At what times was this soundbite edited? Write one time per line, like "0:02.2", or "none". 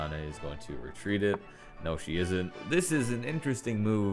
0:02.6